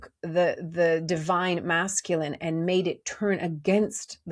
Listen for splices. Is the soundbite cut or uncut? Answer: uncut